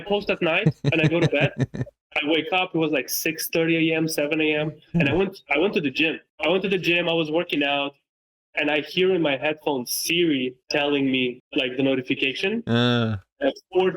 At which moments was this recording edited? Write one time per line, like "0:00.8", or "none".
0:06.3
0:10.6
0:11.4